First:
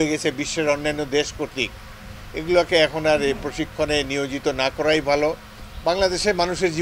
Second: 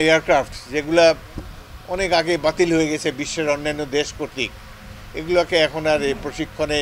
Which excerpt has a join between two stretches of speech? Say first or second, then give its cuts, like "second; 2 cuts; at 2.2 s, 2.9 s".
first; 1 cut; at 5.5 s